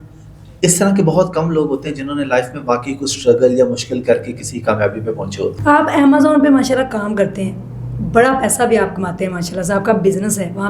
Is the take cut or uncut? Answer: cut